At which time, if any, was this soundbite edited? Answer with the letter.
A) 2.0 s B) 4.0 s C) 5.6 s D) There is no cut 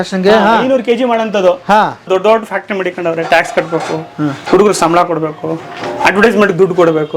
A